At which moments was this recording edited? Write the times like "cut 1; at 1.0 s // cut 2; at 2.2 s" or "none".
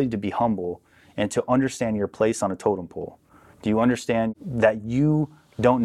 cut 1; at 4.3 s